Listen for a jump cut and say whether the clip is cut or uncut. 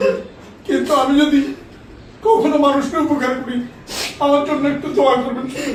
uncut